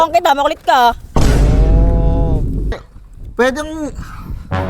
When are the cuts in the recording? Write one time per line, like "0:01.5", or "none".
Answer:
0:02.8